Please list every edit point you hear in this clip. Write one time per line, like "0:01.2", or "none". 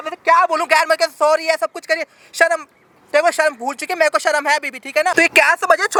none